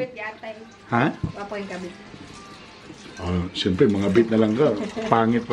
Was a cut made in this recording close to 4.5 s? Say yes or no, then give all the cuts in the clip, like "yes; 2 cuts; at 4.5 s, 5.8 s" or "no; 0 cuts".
no; 1 cut; at 2.4 s